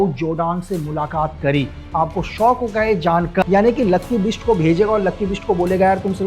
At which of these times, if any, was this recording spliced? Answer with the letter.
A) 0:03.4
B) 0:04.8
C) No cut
A